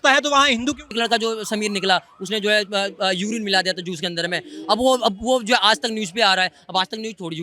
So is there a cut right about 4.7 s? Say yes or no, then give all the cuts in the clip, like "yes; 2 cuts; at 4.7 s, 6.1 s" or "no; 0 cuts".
no; 1 cut; at 0.9 s